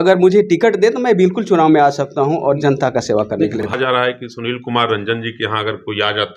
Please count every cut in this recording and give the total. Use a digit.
1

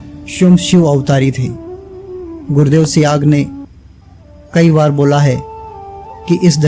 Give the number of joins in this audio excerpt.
0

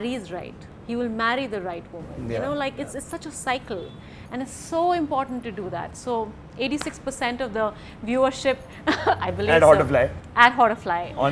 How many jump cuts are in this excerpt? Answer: 0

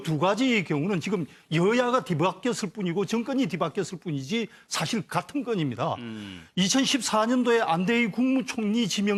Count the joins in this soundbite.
0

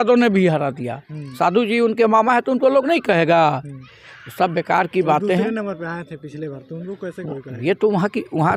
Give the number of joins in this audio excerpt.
0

